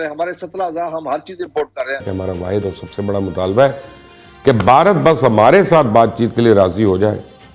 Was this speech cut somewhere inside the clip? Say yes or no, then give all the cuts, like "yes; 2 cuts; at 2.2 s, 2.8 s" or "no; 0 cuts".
yes; 1 cut; at 2.0 s